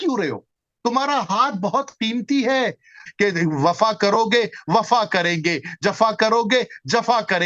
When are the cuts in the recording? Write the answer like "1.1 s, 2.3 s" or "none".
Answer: 3.0 s